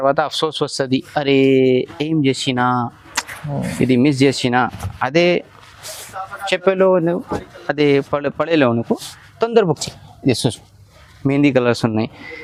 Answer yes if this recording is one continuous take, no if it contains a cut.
yes